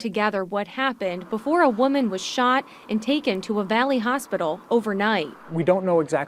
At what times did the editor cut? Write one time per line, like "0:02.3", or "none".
none